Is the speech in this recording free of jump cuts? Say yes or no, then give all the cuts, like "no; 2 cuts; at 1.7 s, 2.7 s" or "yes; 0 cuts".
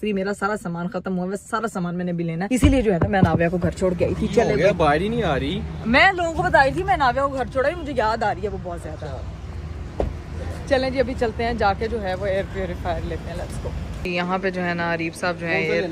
yes; 0 cuts